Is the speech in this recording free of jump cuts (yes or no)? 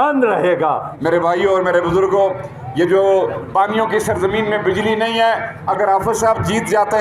no